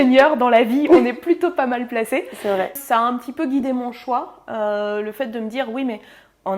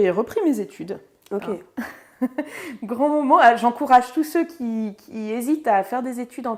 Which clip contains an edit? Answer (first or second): first